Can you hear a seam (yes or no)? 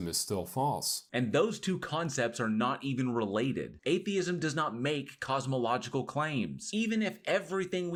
no